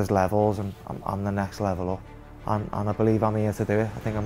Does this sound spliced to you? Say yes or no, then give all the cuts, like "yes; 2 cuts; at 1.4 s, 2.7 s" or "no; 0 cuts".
yes; 1 cut; at 2.1 s